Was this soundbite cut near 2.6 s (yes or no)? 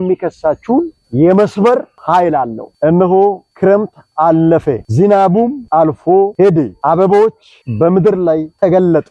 yes